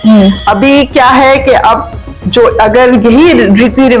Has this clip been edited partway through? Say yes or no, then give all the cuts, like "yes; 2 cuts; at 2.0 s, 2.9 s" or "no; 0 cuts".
no; 0 cuts